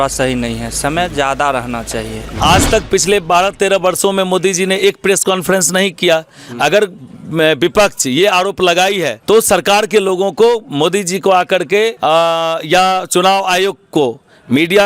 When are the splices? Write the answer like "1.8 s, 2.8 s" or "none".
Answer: 2.2 s, 9.1 s, 12.0 s